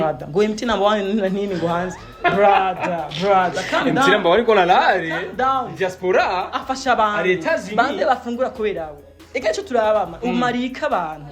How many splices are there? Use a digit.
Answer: 0